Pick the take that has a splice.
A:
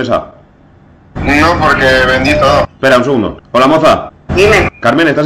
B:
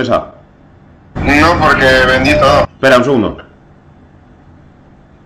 A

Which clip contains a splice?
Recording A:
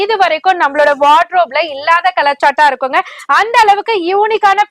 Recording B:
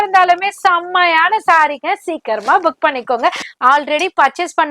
B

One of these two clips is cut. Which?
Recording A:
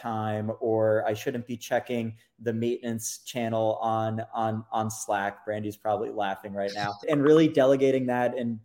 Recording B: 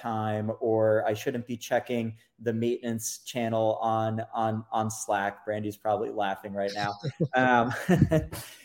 A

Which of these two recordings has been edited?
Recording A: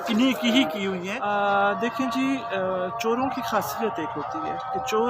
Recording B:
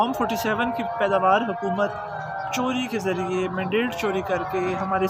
A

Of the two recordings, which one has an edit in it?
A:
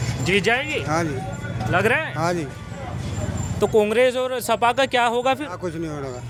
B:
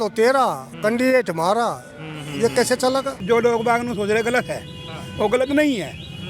B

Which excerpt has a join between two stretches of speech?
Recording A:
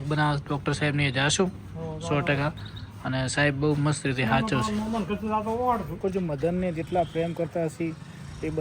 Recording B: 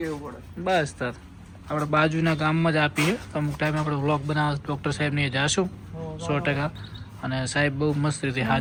A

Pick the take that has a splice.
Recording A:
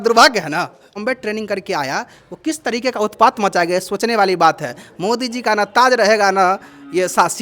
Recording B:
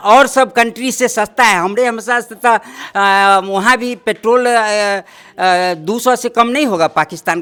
A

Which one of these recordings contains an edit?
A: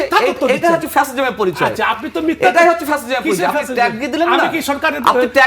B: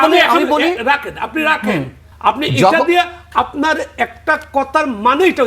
B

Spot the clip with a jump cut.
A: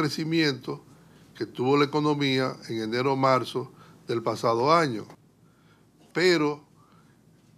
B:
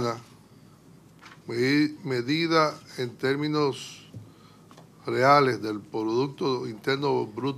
B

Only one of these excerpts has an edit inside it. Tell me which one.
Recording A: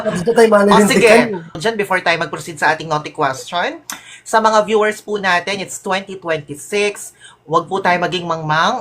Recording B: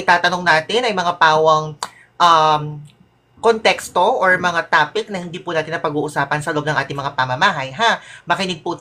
A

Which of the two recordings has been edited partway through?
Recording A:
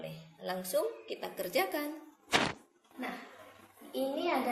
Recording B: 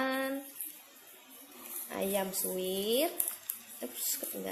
A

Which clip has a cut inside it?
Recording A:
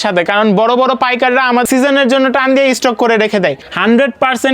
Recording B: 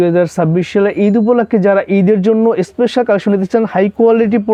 A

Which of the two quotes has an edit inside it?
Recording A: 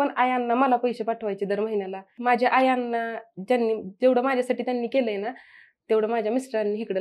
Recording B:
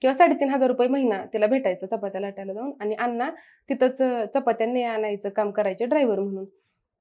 A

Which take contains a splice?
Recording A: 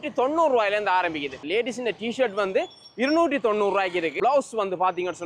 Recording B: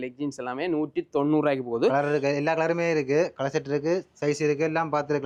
A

